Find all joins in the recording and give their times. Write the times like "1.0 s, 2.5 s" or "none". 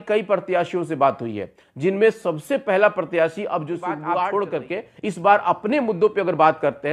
4.0 s